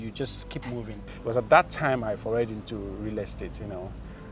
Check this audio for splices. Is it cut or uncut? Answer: cut